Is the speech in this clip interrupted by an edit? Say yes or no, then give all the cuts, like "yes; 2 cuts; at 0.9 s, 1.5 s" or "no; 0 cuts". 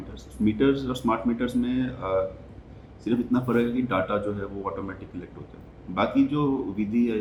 no; 0 cuts